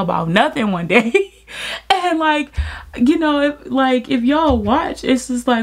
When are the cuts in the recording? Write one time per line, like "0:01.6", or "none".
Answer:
none